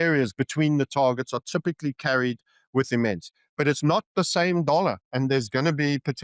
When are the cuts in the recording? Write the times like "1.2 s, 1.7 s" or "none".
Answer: none